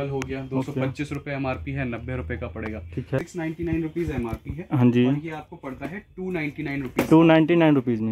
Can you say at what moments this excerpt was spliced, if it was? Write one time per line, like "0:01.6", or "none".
0:03.2